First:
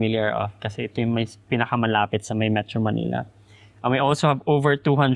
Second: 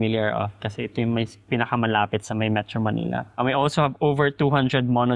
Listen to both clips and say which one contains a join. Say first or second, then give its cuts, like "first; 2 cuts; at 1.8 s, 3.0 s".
second; 1 cut; at 3.3 s